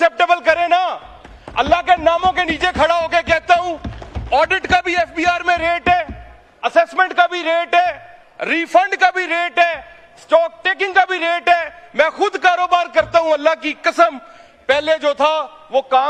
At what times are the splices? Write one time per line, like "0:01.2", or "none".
none